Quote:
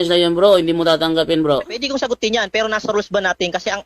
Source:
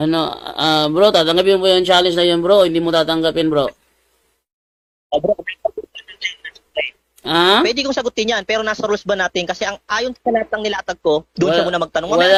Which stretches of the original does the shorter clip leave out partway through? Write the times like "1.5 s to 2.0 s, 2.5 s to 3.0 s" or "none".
3.9 s to 7.8 s